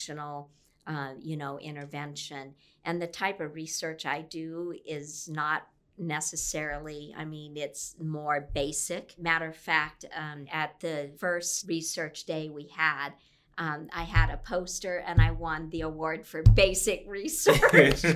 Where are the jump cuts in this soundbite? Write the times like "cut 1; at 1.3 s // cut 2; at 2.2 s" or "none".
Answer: cut 1; at 9.2 s // cut 2; at 10.4 s // cut 3; at 11.5 s

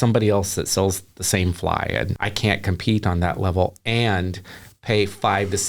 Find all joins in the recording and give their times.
cut 1; at 2.2 s

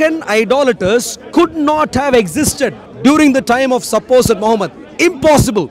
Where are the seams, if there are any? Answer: cut 1; at 2.9 s

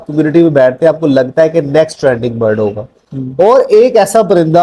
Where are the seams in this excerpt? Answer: cut 1; at 3.0 s

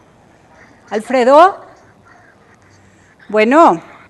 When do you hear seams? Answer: cut 1; at 1.3 s

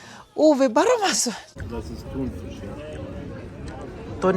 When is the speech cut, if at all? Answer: cut 1; at 1.6 s

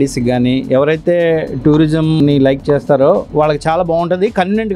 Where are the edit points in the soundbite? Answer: cut 1; at 2.2 s

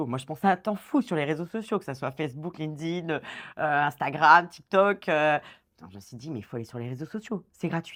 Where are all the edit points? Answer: none

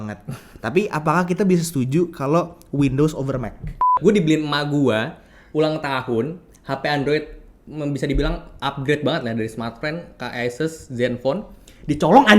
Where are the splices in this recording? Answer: cut 1; at 4.0 s

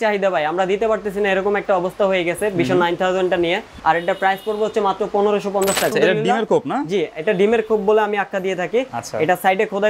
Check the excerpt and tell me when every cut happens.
cut 1; at 3.7 s // cut 2; at 5.9 s

